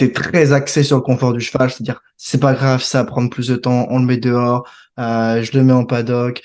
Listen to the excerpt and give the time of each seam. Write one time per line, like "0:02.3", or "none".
none

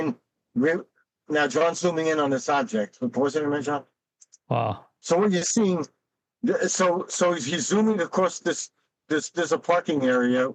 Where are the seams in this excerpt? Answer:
none

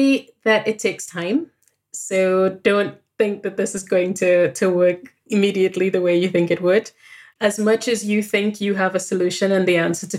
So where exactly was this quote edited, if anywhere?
0:05.1

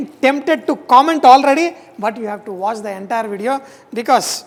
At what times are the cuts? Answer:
none

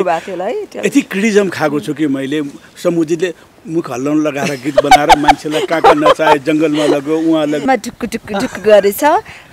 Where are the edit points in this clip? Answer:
0:07.7

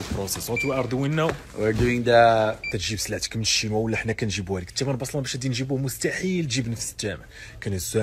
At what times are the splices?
0:02.7

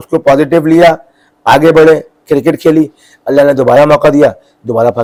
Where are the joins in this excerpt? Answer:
none

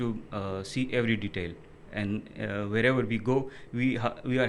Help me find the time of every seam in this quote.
none

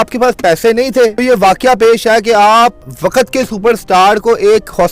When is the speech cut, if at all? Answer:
0:01.2
0:02.8

